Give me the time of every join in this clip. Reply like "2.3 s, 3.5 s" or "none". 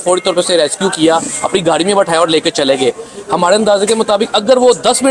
none